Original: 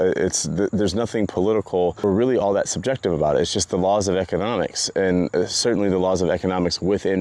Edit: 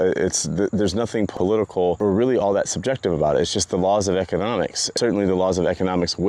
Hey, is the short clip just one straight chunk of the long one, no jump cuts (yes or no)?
no